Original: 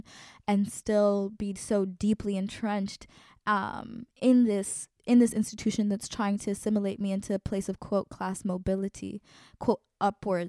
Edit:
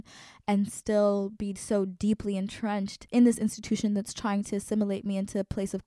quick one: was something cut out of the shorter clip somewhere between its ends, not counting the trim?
yes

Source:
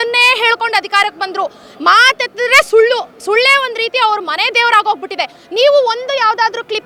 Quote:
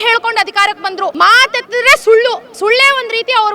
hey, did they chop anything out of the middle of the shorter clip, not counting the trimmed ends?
yes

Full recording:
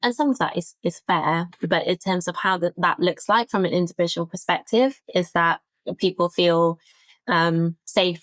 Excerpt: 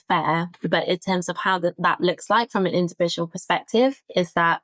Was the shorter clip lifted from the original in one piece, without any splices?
yes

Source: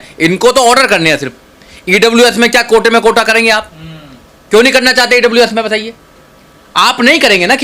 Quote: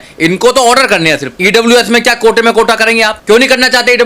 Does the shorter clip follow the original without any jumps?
no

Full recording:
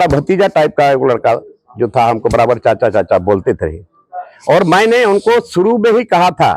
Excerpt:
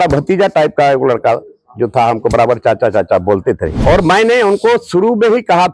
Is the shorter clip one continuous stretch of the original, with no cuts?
no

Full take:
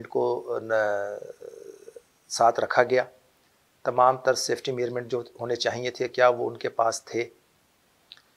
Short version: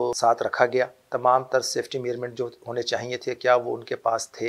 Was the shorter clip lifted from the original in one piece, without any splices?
no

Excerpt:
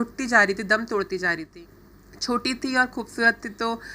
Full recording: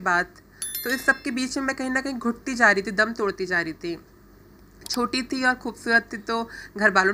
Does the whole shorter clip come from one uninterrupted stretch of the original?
no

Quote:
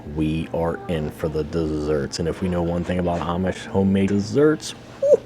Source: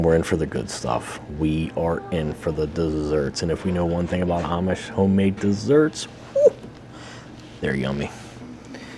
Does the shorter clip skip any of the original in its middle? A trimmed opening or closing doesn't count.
yes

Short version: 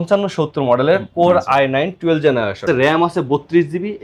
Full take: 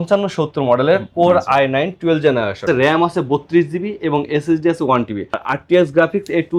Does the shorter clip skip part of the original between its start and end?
no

